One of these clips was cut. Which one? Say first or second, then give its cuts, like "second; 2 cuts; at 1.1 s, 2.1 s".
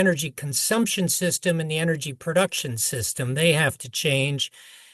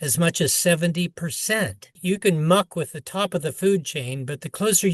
second; 1 cut; at 1.9 s